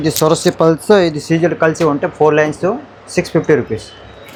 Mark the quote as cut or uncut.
uncut